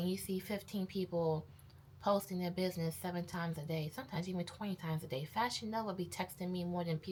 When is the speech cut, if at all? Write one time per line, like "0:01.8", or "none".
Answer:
none